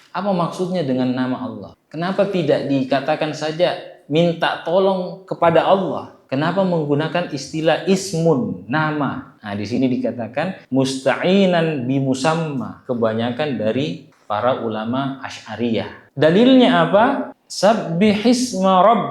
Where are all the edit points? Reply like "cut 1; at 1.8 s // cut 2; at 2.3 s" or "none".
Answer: cut 1; at 12.8 s // cut 2; at 17.3 s